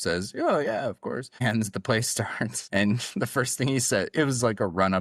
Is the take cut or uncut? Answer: cut